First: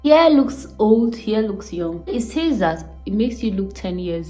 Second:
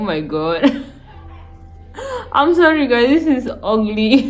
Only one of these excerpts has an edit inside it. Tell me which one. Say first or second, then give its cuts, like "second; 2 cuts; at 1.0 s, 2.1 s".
first; 1 cut; at 2.1 s